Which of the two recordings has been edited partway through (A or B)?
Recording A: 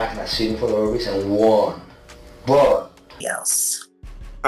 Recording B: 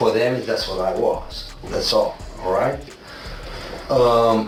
A